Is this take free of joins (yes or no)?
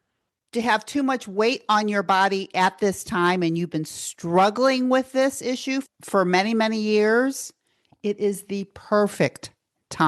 no